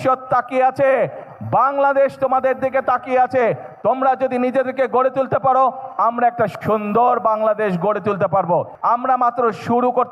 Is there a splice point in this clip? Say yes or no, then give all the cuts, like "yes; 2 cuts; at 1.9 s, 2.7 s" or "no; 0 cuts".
yes; 1 cut; at 8.7 s